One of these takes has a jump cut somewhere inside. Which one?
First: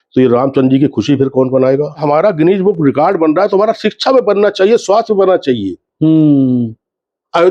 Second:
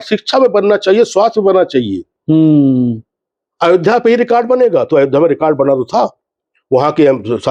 first; 1 cut; at 2.0 s

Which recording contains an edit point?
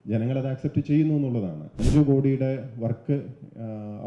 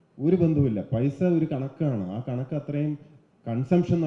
first; 1 cut; at 1.8 s

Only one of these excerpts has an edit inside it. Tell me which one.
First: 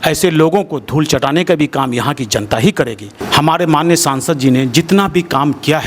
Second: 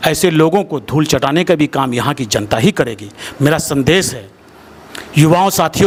first; 1 cut; at 3.1 s

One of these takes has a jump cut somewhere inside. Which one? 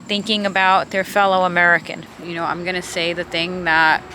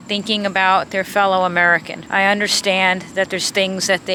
first; 1 cut; at 1.9 s

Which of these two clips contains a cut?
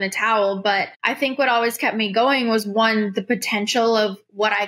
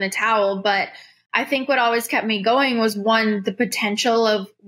first; 1 cut; at 1.0 s

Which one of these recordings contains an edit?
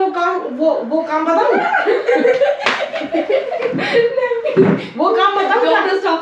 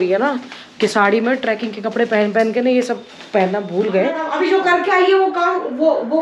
second; 1 cut; at 4.2 s

